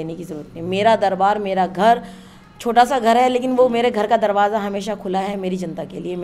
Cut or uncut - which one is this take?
uncut